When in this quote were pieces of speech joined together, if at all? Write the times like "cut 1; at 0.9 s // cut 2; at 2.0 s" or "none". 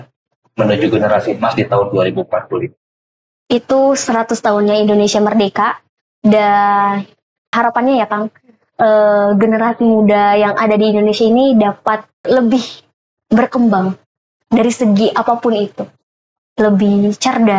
cut 1; at 7.5 s // cut 2; at 12.2 s